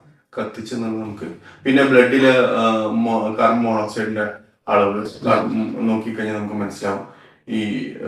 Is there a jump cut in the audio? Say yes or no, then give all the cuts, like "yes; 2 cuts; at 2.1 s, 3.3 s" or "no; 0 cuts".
no; 0 cuts